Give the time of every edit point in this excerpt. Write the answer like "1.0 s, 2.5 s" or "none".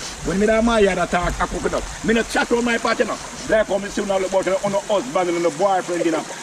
3.3 s